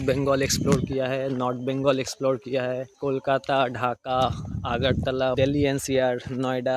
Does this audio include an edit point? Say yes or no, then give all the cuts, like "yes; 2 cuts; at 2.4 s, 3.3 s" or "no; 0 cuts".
yes; 2 cuts; at 2.9 s, 5.4 s